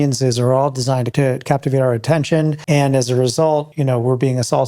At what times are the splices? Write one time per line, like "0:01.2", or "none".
0:01.1
0:02.6
0:03.7